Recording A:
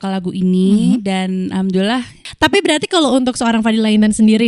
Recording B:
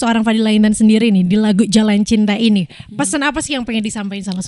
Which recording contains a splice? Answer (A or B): A